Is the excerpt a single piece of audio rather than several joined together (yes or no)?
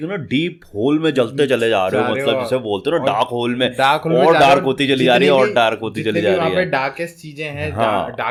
yes